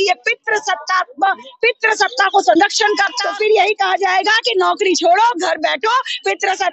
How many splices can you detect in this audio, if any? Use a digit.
1